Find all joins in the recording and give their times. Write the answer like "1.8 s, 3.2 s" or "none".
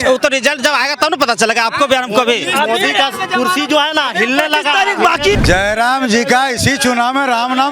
5.4 s